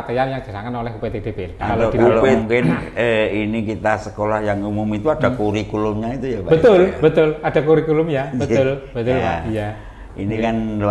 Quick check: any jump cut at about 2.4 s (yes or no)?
yes